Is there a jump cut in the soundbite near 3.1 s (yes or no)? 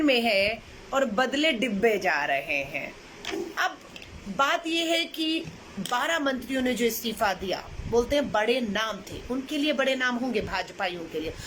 yes